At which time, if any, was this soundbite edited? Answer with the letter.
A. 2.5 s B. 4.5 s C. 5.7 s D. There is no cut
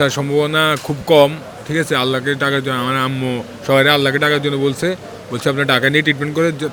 D